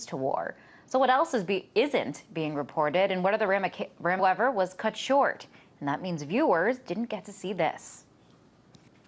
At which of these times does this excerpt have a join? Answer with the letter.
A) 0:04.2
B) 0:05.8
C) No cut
C